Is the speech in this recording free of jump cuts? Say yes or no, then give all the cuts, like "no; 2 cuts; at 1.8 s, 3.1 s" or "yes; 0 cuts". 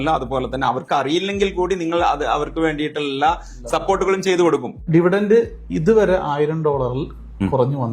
no; 1 cut; at 4.8 s